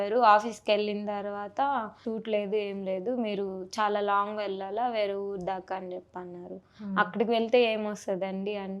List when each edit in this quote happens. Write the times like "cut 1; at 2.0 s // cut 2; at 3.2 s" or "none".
cut 1; at 2.0 s